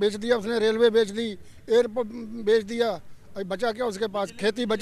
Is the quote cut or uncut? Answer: uncut